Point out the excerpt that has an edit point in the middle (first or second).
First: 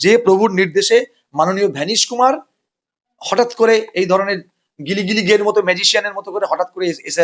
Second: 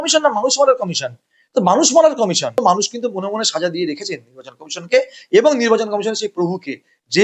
second